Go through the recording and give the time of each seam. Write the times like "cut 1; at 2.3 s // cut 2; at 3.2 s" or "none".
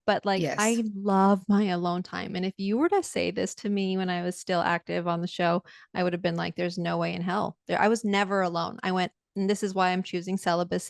none